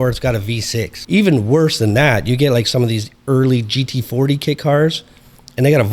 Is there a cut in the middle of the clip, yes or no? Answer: yes